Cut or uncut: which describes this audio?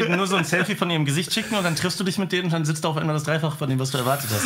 uncut